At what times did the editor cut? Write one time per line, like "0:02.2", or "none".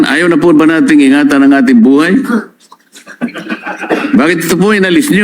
none